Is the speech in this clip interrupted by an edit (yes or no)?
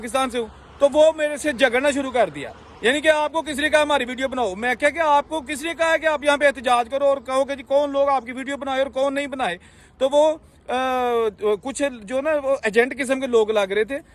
no